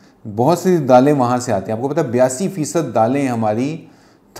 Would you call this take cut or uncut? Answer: uncut